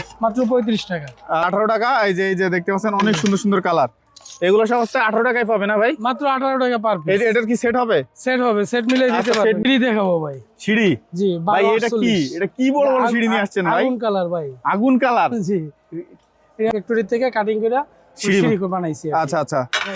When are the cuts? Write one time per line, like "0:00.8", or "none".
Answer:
0:01.4
0:09.6
0:16.7

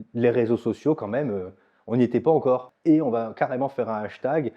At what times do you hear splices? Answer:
0:02.7

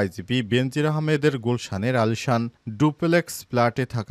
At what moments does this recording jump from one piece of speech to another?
none

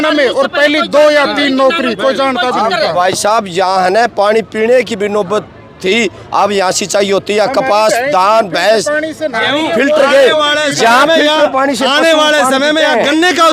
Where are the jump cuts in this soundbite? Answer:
none

